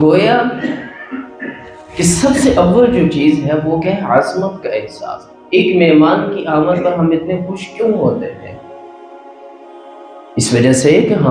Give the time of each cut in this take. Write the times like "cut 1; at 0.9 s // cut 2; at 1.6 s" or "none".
none